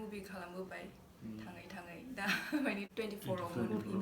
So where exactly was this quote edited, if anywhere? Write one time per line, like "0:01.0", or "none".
0:02.9